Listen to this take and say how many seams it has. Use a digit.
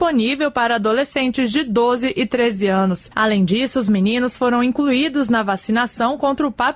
1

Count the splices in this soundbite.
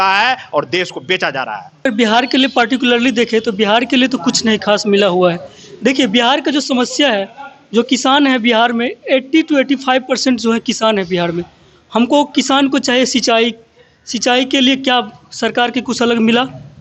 0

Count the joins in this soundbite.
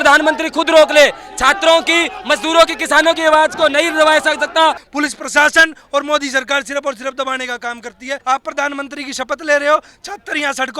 2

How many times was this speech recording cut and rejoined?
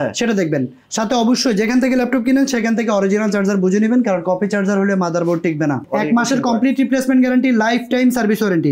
1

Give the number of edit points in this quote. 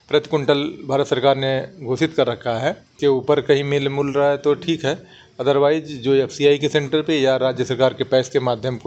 1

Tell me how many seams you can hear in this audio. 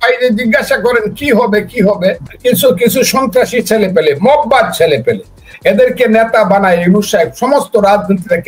1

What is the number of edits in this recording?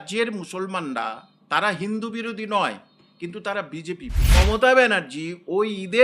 1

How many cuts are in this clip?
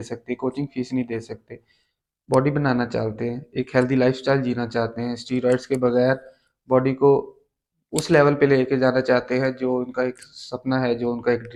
0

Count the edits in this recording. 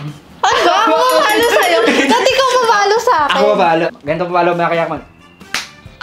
1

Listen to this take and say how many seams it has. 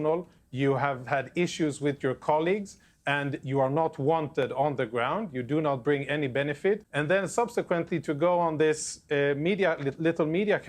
1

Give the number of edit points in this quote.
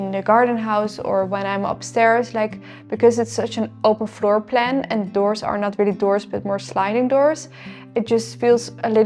0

